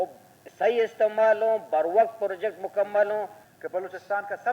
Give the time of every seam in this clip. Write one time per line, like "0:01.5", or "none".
0:03.4